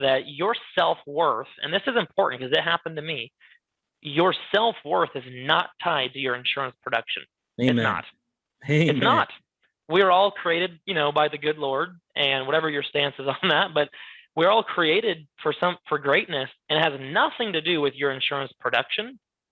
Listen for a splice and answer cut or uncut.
uncut